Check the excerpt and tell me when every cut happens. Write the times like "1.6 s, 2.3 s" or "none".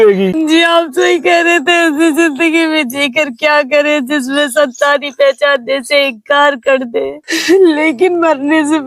7.3 s